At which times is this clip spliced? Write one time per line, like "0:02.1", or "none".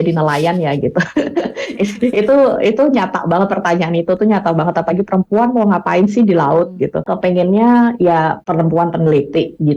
0:07.1
0:08.4